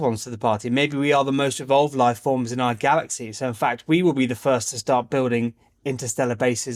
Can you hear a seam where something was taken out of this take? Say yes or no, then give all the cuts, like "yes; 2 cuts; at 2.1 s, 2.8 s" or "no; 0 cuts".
no; 0 cuts